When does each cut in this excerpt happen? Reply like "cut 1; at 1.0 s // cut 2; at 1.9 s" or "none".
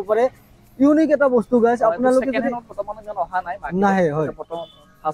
none